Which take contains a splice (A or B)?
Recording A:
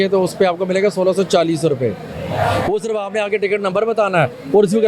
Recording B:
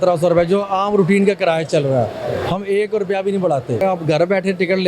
B